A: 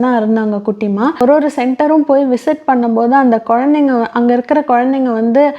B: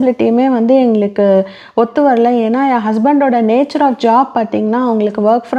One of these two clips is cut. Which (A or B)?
A